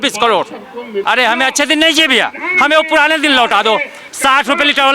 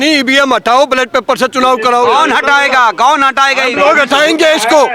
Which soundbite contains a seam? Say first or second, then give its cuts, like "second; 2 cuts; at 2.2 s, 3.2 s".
first; 1 cut; at 1.0 s